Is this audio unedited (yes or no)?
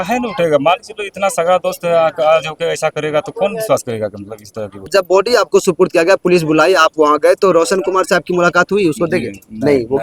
no